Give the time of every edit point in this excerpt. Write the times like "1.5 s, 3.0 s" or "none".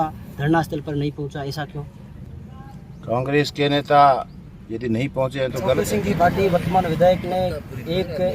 5.8 s